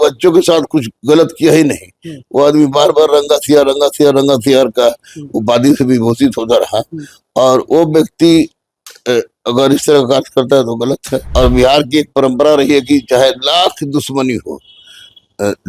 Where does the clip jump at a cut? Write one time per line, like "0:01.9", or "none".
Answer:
0:11.1